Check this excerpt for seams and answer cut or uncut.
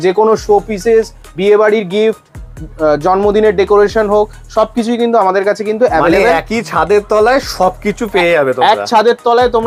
uncut